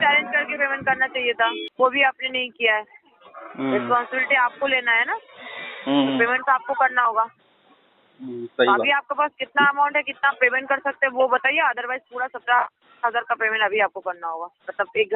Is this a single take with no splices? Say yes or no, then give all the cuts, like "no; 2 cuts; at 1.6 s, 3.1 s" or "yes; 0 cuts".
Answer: no; 1 cut; at 1.7 s